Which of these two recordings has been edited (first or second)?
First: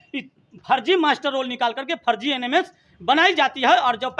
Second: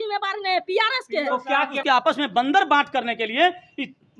second